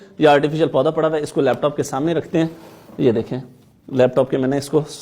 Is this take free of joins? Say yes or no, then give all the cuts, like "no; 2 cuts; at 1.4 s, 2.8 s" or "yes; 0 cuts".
yes; 0 cuts